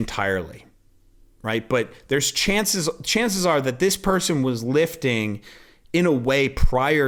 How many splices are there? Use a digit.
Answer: 0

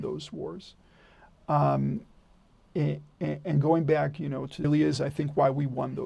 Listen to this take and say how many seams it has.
1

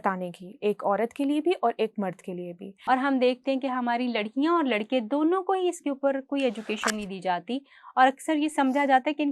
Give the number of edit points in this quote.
1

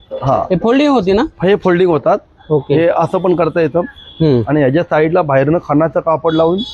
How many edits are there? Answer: 0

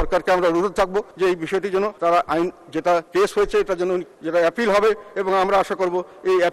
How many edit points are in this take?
4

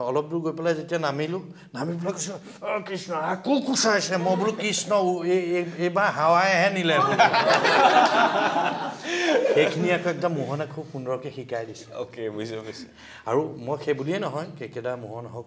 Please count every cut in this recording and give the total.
0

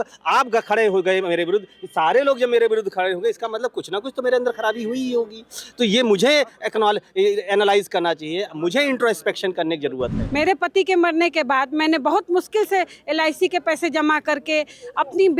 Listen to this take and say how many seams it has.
1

